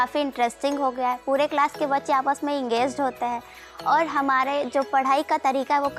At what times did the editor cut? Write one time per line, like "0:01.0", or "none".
none